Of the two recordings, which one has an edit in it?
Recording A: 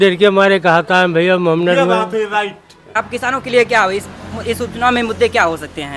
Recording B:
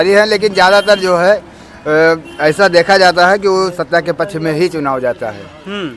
A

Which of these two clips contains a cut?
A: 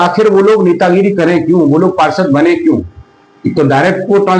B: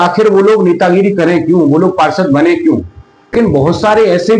B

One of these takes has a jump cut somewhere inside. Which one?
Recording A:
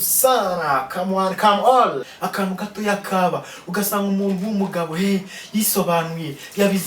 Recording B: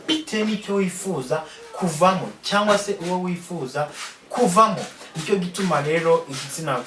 A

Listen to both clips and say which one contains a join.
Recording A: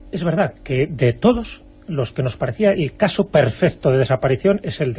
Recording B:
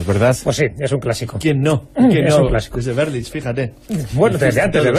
B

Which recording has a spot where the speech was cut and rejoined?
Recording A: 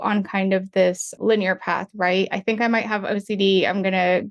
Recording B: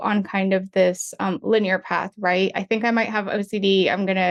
A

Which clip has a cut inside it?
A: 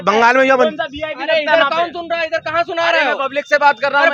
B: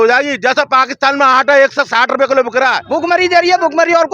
B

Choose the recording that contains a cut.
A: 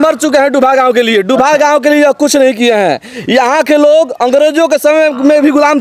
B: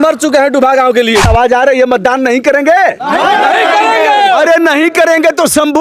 B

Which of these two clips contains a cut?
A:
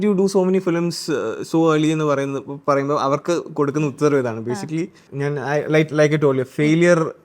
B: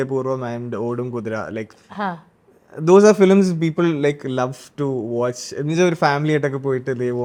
A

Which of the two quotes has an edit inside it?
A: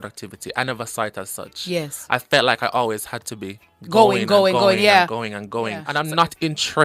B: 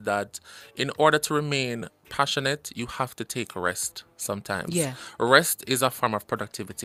A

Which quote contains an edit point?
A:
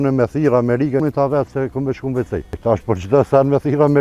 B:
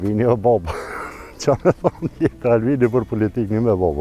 A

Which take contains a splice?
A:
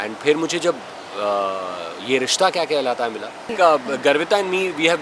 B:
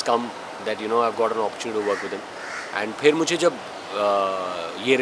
A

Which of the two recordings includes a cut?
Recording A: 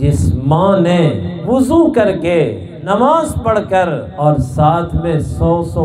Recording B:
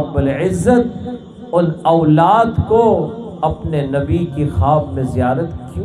A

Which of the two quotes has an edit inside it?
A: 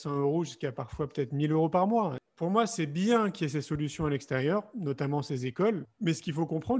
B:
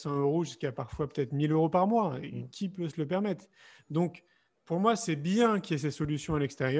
A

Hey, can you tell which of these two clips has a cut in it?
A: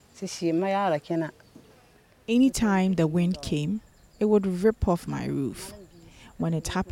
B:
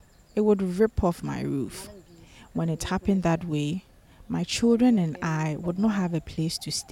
A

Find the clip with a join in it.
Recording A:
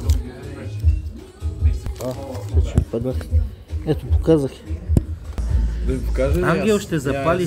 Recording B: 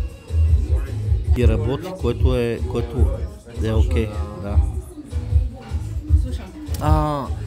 A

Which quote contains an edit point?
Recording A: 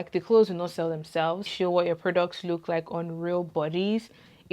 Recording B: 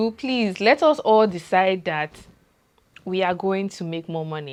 A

